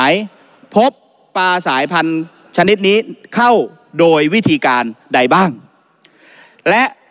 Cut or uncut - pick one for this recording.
uncut